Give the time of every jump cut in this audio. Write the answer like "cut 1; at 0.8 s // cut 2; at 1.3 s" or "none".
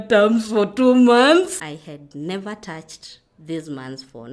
cut 1; at 1.5 s